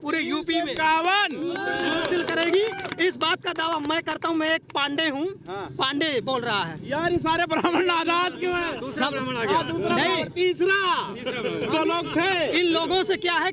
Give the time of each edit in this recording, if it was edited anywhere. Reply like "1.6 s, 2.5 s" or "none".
none